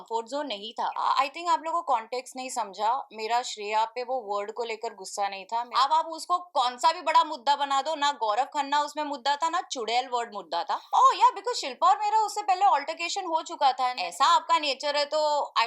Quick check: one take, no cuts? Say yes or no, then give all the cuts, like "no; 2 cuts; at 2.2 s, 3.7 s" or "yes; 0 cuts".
no; 4 cuts; at 0.9 s, 5.7 s, 10.8 s, 14.0 s